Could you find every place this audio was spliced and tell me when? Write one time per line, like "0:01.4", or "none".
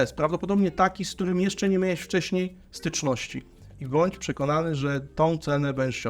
0:03.7